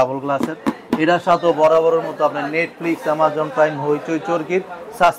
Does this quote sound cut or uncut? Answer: uncut